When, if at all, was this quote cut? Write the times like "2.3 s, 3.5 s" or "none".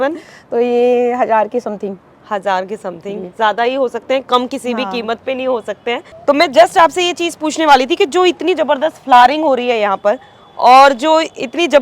6.1 s